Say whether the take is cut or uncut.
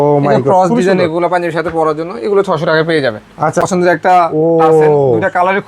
cut